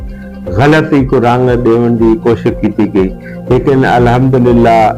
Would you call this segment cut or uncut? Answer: uncut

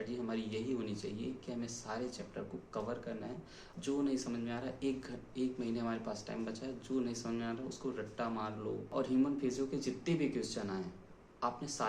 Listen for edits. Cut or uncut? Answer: cut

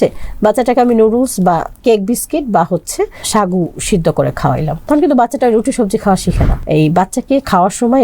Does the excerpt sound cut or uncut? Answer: cut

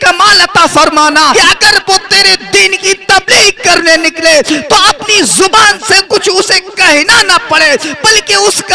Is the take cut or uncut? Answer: uncut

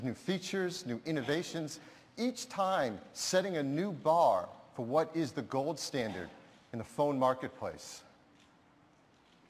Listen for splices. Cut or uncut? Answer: uncut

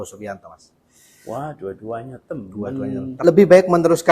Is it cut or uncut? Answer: cut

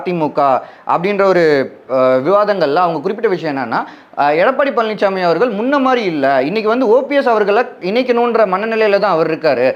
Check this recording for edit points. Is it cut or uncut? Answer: uncut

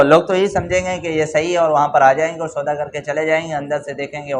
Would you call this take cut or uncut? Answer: uncut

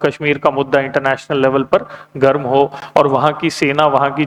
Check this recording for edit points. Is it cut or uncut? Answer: uncut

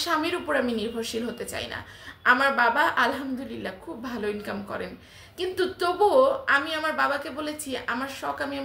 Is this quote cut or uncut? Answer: uncut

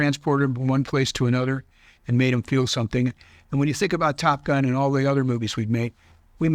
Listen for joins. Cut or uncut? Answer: uncut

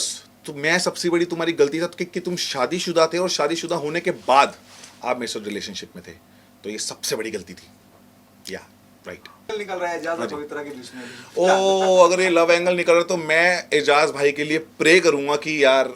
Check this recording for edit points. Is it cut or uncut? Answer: cut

